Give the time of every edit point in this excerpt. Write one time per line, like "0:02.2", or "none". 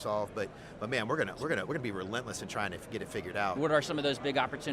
0:03.6